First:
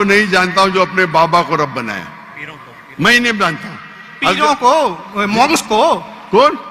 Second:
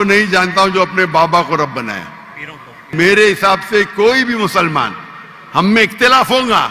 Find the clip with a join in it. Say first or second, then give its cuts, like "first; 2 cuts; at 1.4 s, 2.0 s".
second; 1 cut; at 2.9 s